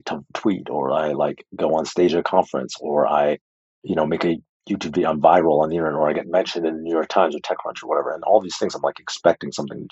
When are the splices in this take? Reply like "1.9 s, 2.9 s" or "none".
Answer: none